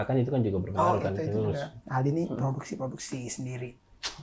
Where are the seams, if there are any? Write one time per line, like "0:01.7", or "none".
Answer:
0:01.8